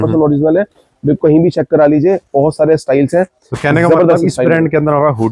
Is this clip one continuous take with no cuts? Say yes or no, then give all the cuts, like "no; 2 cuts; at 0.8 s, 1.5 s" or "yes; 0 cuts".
yes; 0 cuts